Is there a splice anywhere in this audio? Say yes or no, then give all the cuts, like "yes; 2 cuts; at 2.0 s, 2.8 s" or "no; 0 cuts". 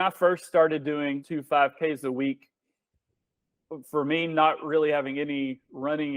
yes; 1 cut; at 1.2 s